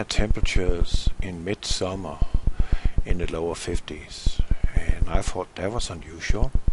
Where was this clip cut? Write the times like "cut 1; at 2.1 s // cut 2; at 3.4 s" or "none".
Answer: cut 1; at 5.8 s